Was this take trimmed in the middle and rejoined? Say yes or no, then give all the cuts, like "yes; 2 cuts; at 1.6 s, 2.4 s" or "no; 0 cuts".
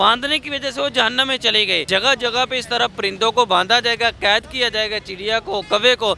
yes; 1 cut; at 1.8 s